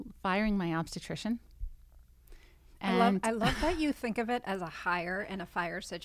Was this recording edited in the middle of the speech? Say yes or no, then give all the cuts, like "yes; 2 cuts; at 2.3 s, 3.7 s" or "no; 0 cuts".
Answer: no; 0 cuts